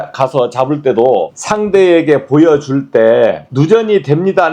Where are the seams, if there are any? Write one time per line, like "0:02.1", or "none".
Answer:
0:01.4
0:03.5